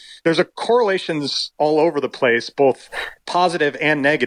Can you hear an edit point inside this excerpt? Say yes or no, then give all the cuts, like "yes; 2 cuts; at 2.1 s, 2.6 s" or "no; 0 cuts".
no; 0 cuts